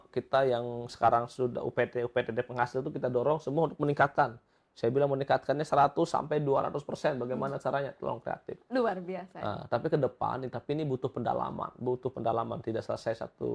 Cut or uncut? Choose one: uncut